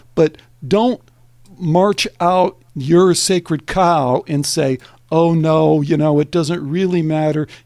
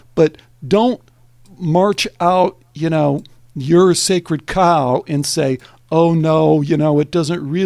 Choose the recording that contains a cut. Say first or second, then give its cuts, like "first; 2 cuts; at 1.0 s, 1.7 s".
first; 1 cut; at 2.7 s